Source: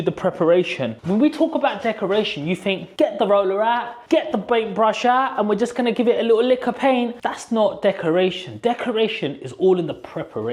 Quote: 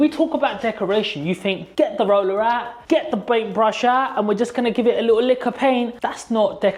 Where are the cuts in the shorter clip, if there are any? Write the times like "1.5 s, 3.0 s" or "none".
none